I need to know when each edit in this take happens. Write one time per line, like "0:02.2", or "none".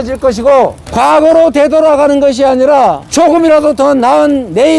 0:03.0